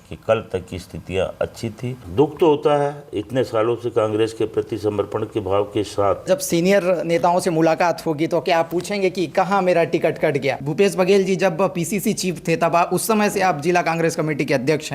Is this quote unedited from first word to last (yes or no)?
no